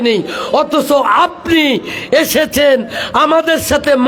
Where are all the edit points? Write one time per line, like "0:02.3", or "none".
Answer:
none